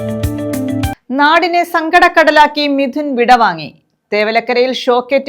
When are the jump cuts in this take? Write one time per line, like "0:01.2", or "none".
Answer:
0:00.9

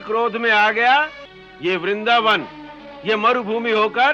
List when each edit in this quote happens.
0:01.5

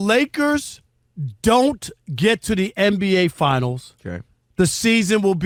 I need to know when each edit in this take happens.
none

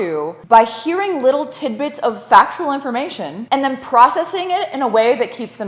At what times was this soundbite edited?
none

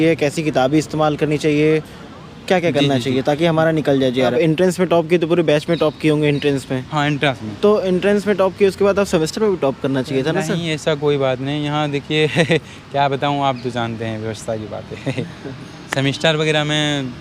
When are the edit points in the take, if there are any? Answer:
0:04.3

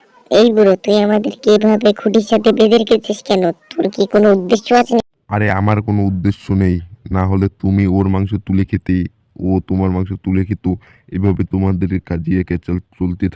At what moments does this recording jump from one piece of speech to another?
none

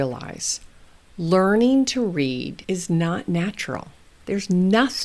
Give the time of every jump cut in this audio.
0:02.5

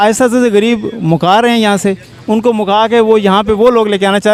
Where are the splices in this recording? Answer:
none

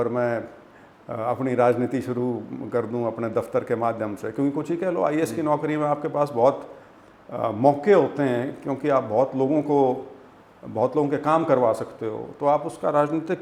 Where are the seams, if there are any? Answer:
none

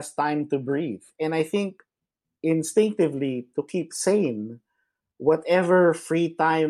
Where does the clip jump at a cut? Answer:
0:01.0

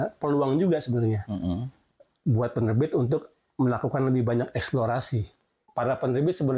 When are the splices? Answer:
0:05.6

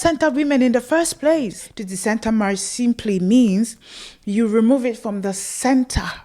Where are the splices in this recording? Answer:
0:01.6

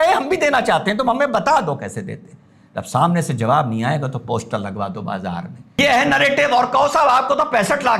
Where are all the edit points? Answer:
0:05.8

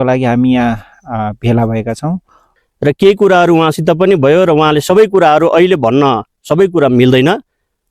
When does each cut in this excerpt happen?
0:02.5

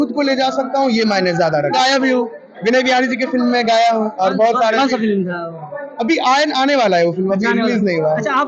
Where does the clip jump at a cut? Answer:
0:01.7

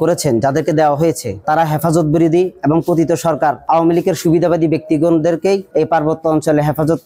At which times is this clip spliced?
none

